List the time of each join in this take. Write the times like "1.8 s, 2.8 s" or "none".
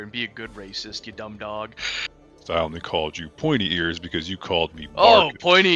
2.4 s

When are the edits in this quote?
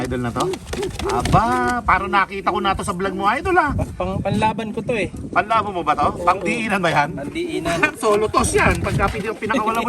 none

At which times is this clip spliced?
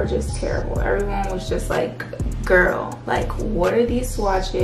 none

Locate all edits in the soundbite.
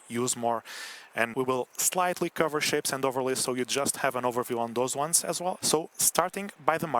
1.3 s, 5.6 s

